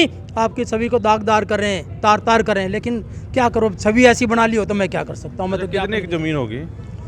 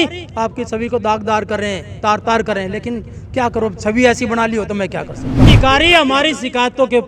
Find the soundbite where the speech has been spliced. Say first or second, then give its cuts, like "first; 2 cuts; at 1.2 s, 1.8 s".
second; 1 cut; at 5.5 s